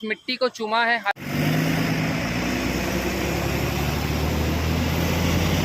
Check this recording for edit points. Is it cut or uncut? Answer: uncut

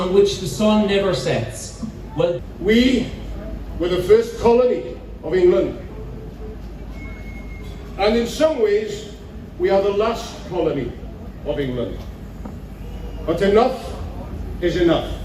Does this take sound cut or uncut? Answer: cut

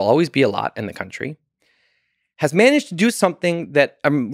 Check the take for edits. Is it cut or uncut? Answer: uncut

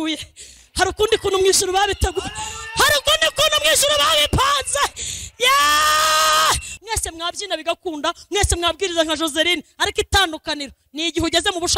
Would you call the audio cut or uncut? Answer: cut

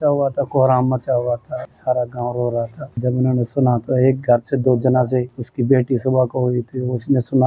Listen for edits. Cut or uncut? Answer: cut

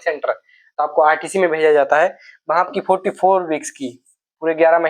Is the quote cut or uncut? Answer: uncut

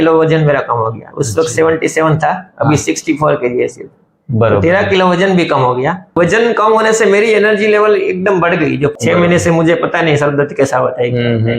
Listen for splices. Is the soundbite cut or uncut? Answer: cut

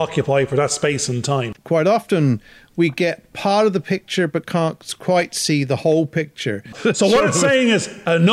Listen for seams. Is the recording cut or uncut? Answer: cut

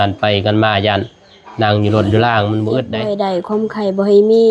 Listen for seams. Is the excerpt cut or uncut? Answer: cut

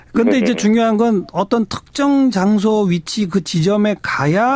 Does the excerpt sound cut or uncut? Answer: cut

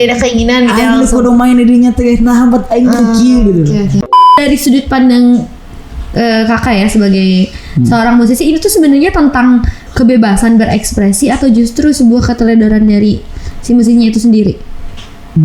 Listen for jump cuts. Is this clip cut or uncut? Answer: cut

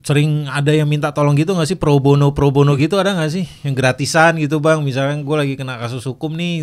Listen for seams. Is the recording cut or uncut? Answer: uncut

